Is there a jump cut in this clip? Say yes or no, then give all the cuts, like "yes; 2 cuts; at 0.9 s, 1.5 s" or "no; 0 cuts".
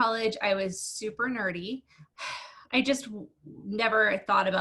yes; 1 cut; at 2.0 s